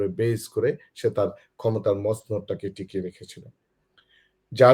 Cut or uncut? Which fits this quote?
uncut